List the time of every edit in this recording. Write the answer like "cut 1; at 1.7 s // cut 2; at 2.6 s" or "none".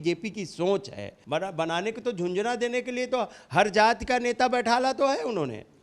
cut 1; at 1.1 s